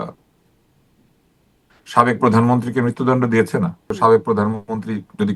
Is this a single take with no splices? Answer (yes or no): no